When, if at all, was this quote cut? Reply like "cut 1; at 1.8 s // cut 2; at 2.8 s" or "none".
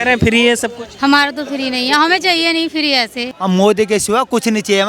cut 1; at 3.3 s